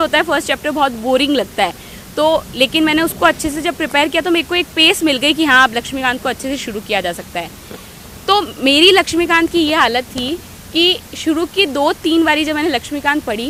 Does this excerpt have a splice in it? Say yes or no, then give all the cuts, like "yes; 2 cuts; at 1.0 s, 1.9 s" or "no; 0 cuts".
no; 0 cuts